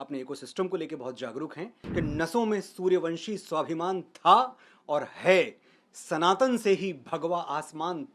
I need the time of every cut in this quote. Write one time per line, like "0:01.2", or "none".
0:01.8